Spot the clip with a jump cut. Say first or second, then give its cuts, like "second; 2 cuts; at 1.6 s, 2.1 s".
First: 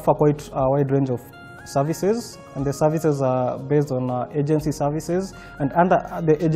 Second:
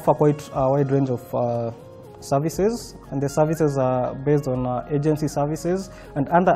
first; 1 cut; at 1.2 s